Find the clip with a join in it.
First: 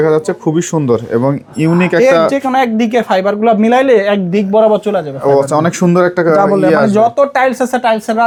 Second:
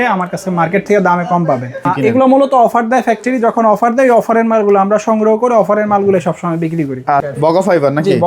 second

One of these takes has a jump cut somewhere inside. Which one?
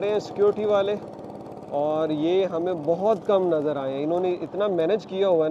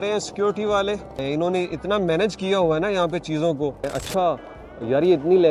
second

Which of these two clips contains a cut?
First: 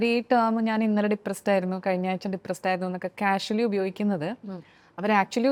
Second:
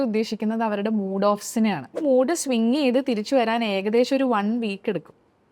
second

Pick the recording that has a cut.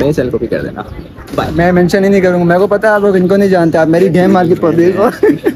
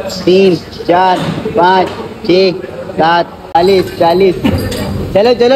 second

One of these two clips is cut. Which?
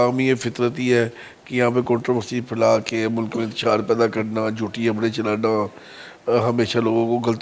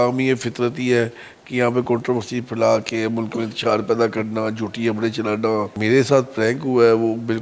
second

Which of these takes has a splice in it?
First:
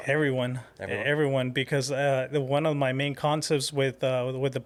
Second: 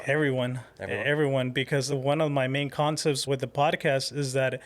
second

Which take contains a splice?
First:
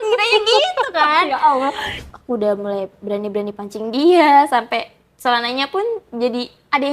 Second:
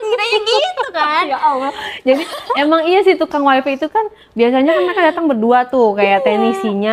first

